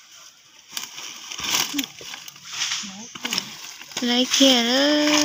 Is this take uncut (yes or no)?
yes